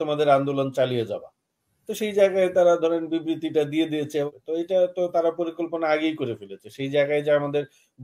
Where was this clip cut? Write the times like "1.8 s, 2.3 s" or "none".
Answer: 4.3 s